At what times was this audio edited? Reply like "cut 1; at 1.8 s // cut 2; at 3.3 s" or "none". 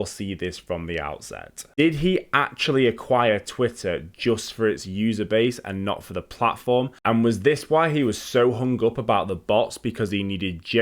cut 1; at 6.9 s